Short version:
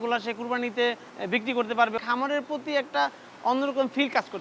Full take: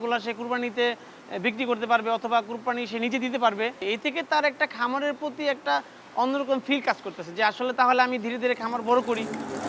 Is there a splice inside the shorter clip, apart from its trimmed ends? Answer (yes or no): yes